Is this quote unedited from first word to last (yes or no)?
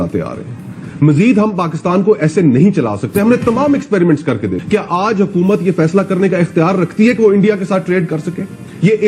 no